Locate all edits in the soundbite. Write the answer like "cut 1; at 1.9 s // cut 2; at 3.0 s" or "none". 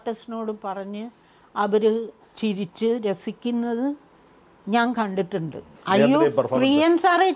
cut 1; at 5.7 s